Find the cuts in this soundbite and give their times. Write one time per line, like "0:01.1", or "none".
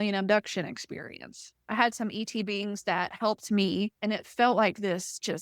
0:01.5
0:04.0

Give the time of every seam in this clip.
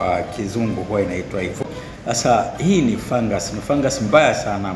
0:01.6

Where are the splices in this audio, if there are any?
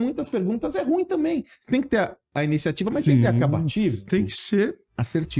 0:04.1

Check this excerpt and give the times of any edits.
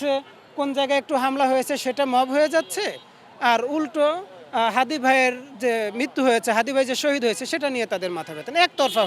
none

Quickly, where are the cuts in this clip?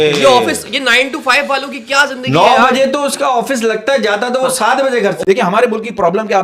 0:05.2

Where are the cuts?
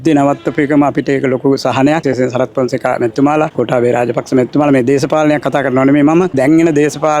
0:02.0
0:06.3

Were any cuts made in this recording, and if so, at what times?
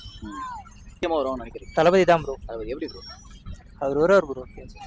0:01.0

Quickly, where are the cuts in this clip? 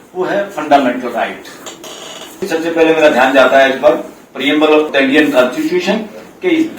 0:02.5
0:04.9

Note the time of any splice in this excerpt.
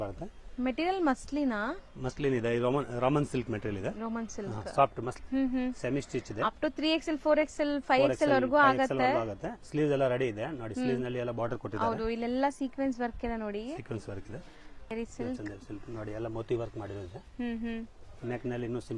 0:05.1
0:14.9

